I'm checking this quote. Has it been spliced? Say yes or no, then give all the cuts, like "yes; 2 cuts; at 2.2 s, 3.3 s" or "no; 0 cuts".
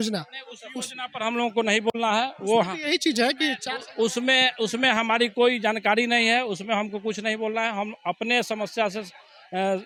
no; 0 cuts